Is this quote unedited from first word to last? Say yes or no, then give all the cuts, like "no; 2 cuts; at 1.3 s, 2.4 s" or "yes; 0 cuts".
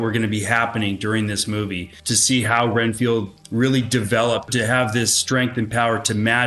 no; 3 cuts; at 1.9 s, 3.4 s, 4.5 s